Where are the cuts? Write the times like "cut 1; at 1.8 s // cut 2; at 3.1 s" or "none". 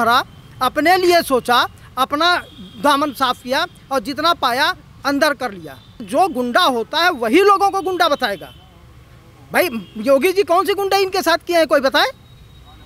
cut 1; at 6.1 s